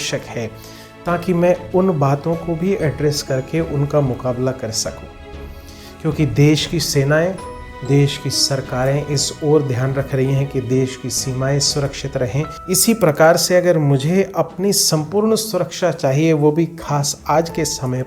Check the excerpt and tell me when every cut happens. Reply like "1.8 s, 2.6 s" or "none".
12.5 s